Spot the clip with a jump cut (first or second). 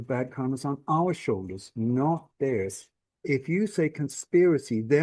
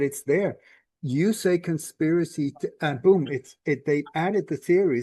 first